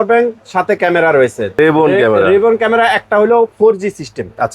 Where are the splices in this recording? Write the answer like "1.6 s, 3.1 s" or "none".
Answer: 1.6 s